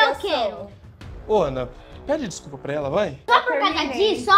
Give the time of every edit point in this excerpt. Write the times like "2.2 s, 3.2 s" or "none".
3.2 s